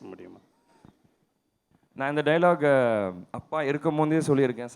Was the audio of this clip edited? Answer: no; 0 cuts

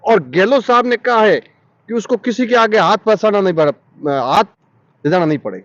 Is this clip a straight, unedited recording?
yes; 0 cuts

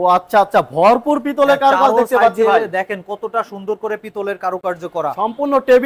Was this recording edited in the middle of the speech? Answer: no; 0 cuts

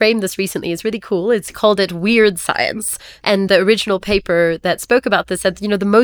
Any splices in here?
yes; 2 cuts; at 1.5 s, 3.4 s

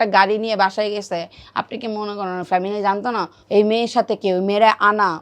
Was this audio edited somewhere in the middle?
yes; 1 cut; at 3.4 s

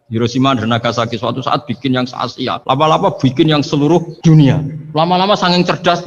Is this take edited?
yes; 3 cuts; at 2.6 s, 4.1 s, 4.8 s

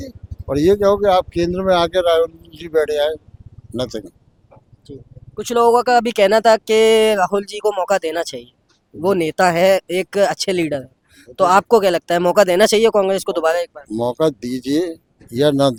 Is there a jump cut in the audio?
no; 0 cuts

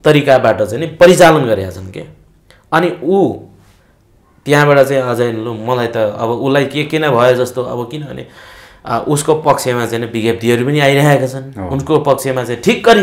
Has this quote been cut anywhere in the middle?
no; 0 cuts

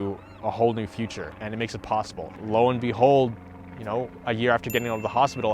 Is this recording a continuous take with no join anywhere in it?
no; 2 cuts; at 1.3 s, 2.3 s

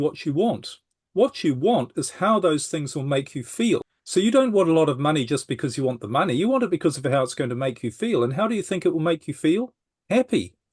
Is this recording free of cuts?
no; 1 cut; at 4.0 s

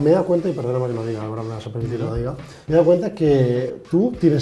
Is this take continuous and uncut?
no; 1 cut; at 2.5 s

